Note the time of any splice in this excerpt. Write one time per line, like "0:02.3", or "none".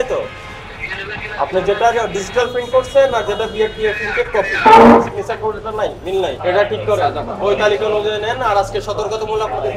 0:06.4